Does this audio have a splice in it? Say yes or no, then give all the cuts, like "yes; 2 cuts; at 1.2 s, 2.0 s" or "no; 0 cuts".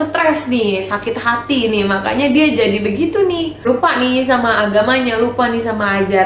no; 0 cuts